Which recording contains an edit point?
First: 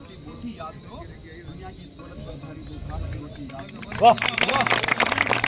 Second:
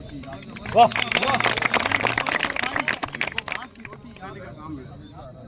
second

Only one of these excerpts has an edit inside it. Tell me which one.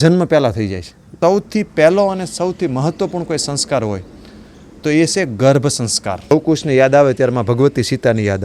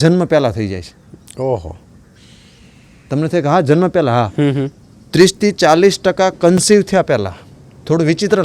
first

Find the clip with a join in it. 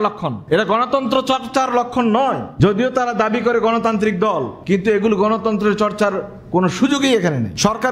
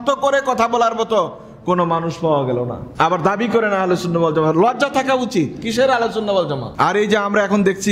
second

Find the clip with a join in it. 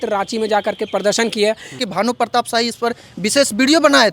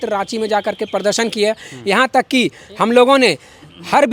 first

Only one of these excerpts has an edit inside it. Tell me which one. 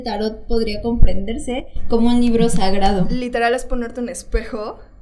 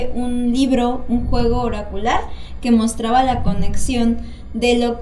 first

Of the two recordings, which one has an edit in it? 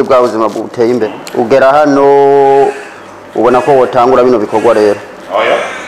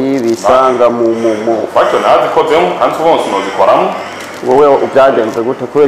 first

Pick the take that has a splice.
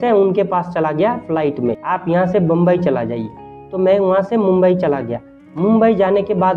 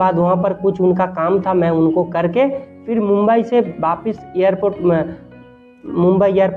first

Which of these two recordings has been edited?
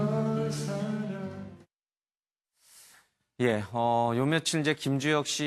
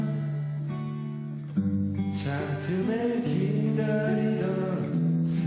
second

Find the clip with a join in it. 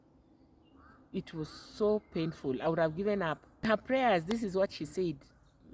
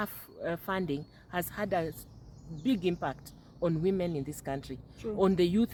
first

